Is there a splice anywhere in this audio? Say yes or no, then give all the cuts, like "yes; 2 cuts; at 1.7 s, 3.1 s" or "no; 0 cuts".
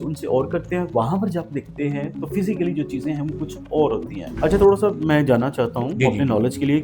yes; 1 cut; at 4.3 s